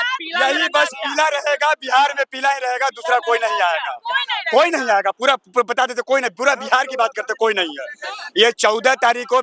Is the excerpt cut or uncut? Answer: uncut